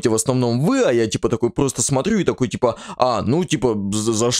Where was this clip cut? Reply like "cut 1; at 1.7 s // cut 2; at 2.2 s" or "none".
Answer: none